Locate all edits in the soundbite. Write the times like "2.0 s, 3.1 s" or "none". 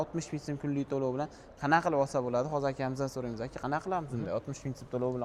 none